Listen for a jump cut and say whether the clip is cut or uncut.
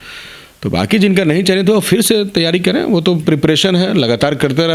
uncut